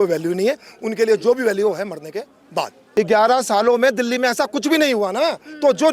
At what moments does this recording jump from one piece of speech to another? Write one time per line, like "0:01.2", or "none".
0:02.8